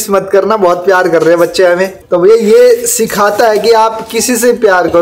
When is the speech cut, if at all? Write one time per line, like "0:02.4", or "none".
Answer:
0:02.0